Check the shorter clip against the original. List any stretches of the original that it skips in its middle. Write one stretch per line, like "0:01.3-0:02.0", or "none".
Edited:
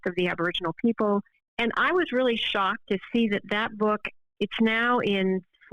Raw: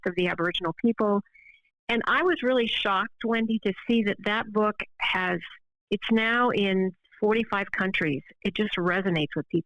0:01.4-0:01.7
0:03.2-0:03.6
0:04.9-0:05.7

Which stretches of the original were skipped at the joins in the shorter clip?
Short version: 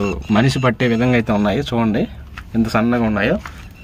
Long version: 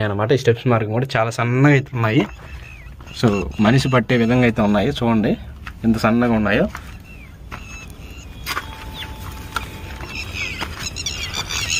none

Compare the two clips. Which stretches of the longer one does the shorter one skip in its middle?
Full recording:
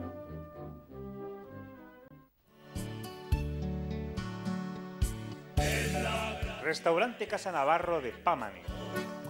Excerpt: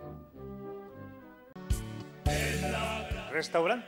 0:02.1-0:04.9

